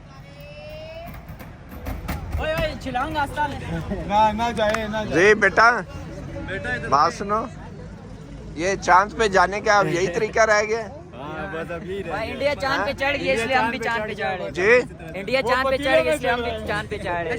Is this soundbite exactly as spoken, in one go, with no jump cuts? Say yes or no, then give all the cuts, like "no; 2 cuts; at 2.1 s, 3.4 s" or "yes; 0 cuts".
yes; 0 cuts